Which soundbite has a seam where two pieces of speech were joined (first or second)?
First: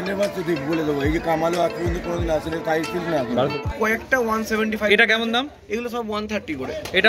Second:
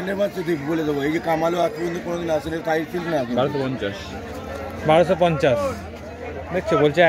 first